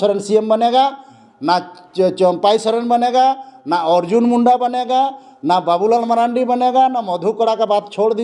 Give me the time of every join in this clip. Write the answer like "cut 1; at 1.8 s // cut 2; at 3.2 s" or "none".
none

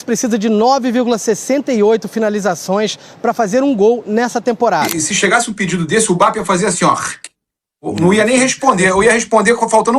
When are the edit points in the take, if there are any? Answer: cut 1; at 5.0 s

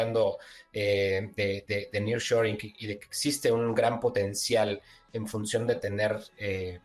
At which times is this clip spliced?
none

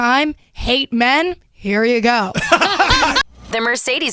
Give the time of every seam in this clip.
cut 1; at 3.2 s

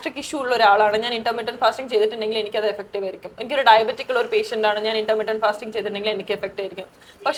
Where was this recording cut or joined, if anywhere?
none

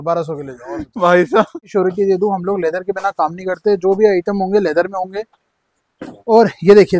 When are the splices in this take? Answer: cut 1; at 1.6 s

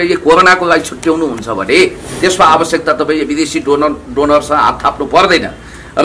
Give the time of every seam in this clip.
none

